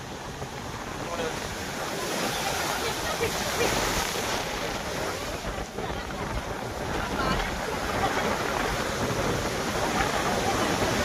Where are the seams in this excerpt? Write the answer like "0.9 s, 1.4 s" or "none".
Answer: none